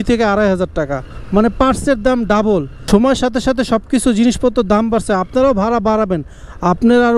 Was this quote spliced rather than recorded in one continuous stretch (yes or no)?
yes